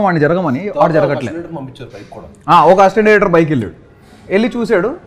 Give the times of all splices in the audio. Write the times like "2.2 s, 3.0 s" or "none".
none